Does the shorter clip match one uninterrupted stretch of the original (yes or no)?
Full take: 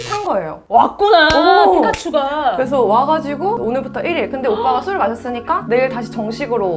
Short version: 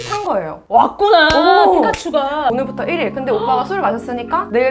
no